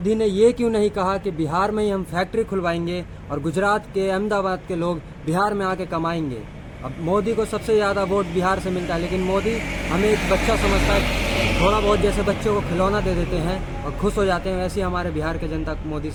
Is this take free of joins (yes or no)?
yes